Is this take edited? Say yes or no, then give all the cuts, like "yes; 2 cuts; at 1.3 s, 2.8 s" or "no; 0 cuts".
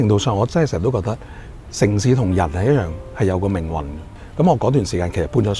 no; 0 cuts